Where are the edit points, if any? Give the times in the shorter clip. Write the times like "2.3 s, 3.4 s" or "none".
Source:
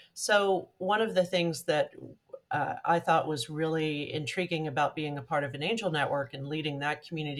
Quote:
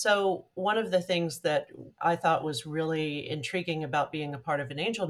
1.9 s